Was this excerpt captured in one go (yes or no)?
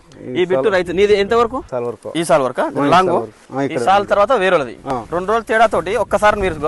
no